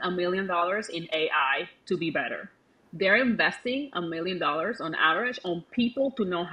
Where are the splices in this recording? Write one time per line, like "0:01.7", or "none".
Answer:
none